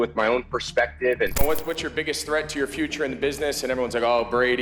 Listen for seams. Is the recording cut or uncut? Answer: cut